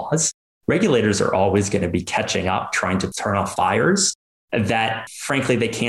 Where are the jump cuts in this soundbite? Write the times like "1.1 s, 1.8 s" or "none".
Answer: none